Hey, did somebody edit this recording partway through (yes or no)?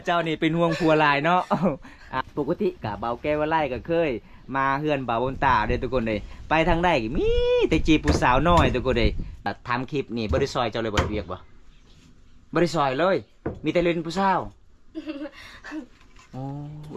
yes